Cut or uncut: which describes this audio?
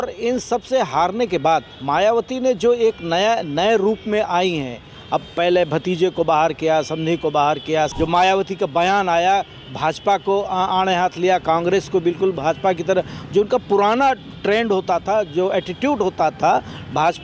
cut